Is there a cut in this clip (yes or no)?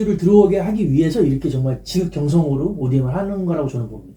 no